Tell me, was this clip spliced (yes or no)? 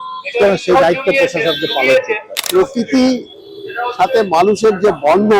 yes